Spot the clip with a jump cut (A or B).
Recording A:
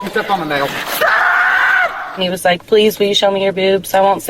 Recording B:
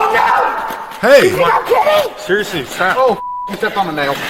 A